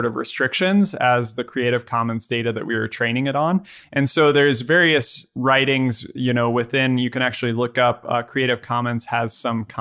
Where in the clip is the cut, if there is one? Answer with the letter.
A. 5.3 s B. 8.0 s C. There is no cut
C